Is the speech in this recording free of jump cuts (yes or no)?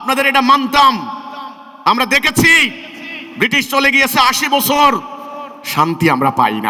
yes